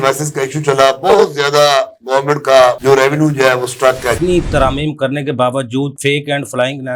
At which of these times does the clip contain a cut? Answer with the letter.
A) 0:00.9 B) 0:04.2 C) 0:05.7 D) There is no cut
B